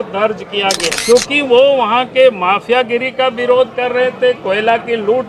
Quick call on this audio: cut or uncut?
cut